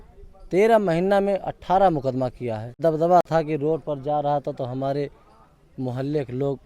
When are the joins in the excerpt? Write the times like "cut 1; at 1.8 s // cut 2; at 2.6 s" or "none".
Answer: cut 1; at 2.8 s